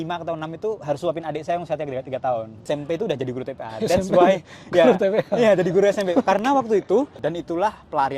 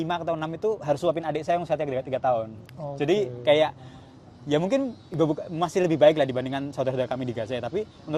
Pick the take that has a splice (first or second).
first